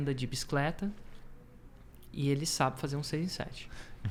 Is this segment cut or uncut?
uncut